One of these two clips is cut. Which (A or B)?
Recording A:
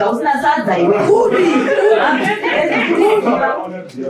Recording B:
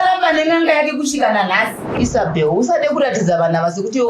B